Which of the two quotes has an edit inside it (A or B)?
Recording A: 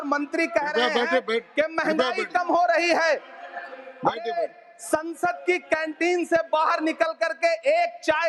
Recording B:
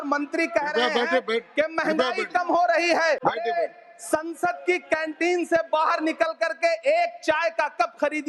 B